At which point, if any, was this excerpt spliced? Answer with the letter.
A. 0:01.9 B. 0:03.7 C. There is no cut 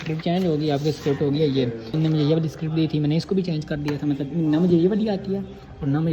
A